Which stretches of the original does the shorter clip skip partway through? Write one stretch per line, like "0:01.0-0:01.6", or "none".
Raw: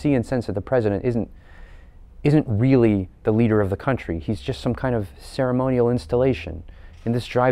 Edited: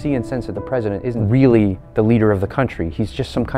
0:01.2-0:02.5